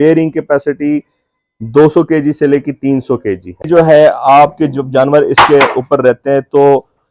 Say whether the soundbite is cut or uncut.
cut